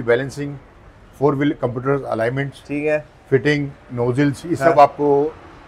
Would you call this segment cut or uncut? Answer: uncut